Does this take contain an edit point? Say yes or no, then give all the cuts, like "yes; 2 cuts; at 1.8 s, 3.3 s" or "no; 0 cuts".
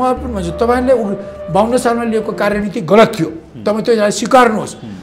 no; 0 cuts